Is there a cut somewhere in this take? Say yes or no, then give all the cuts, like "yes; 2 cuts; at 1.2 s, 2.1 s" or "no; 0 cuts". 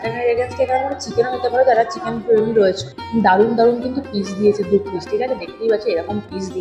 yes; 1 cut; at 2.9 s